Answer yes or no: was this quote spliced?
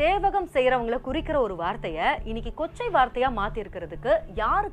no